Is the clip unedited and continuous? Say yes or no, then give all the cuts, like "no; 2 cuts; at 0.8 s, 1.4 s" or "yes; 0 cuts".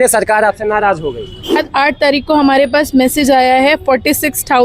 no; 1 cut; at 1.6 s